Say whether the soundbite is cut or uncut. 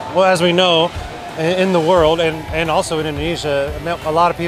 uncut